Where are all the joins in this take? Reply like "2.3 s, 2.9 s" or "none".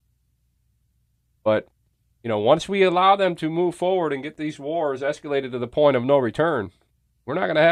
none